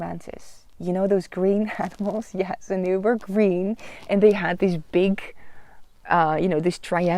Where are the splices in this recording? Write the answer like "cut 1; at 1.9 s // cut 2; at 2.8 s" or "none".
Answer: none